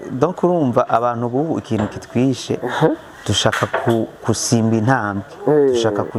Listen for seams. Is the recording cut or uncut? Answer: uncut